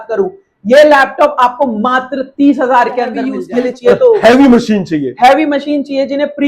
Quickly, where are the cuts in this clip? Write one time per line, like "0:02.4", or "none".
0:03.3